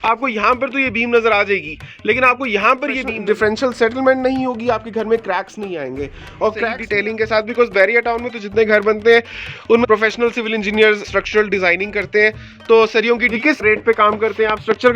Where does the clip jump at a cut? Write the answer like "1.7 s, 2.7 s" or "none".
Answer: 3.2 s, 6.8 s, 9.8 s, 13.4 s

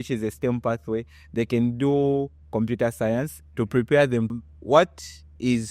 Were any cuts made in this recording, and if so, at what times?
4.4 s

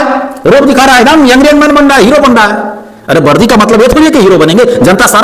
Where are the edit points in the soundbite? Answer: none

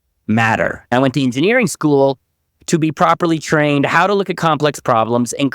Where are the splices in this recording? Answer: 0.9 s

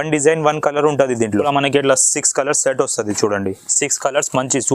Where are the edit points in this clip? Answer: 1.5 s

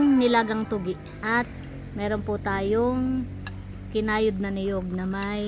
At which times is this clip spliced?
1.2 s

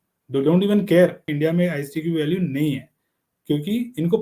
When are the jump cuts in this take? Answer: 1.3 s

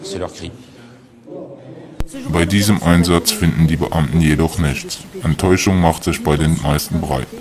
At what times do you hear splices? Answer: 3.5 s

